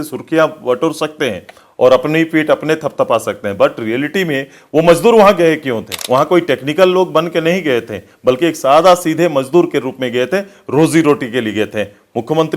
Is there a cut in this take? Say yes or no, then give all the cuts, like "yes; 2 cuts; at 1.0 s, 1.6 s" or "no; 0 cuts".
yes; 1 cut; at 5.9 s